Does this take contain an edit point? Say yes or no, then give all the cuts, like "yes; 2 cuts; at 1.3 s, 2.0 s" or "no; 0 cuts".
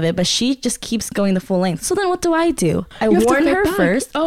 no; 0 cuts